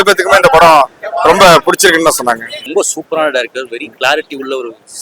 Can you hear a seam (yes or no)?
yes